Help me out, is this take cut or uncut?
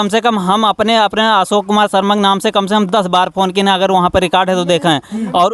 uncut